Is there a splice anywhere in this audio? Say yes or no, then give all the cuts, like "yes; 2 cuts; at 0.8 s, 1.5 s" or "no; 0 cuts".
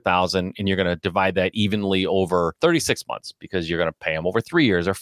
yes; 1 cut; at 2.5 s